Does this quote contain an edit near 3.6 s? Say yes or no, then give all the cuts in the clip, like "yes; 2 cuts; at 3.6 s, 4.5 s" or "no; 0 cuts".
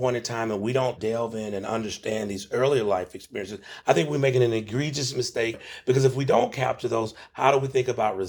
yes; 4 cuts; at 1.0 s, 3.6 s, 5.6 s, 7.2 s